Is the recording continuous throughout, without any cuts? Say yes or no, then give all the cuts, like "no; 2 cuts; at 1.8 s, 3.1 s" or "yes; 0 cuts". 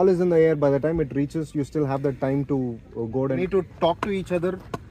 no; 1 cut; at 3.4 s